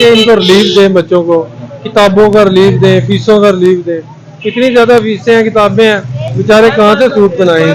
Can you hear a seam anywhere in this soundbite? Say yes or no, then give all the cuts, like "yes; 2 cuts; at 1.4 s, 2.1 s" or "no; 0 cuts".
no; 0 cuts